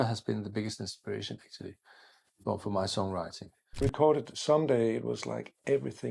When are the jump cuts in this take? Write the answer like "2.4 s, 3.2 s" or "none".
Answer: 3.8 s